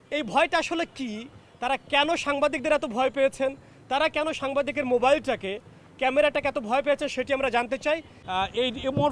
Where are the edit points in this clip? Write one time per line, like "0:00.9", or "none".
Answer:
0:08.2